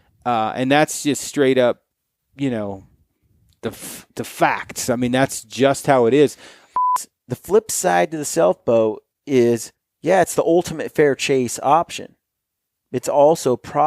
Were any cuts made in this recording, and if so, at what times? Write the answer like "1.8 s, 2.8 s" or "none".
7.0 s